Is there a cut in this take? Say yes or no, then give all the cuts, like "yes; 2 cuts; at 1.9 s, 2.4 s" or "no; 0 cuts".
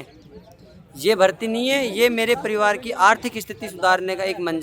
no; 0 cuts